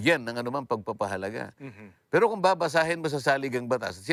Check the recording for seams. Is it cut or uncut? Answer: uncut